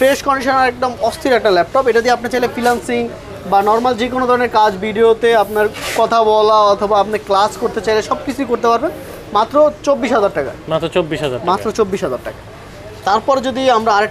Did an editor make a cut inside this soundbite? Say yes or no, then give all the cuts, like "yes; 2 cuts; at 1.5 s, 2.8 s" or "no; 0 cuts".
no; 0 cuts